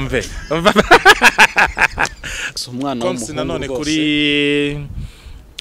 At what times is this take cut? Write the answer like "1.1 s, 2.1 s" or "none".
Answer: 2.5 s